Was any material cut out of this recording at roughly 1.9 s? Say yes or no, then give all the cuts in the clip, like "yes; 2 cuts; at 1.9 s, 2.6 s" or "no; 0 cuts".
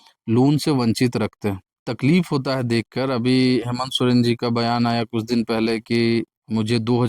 yes; 1 cut; at 1.9 s